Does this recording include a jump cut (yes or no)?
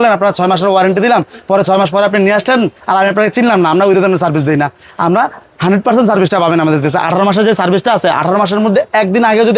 no